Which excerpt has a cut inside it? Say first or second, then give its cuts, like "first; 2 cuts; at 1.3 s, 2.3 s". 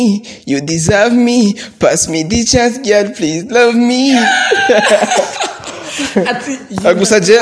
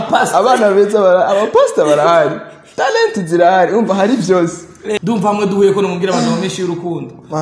second; 1 cut; at 4.9 s